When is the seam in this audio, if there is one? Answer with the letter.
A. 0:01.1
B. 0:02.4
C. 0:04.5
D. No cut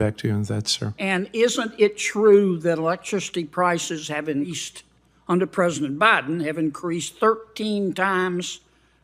C